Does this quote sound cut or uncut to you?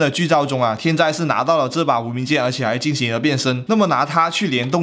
uncut